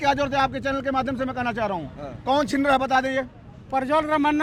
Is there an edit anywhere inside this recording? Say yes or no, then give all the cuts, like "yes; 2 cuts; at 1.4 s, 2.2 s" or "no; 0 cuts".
no; 0 cuts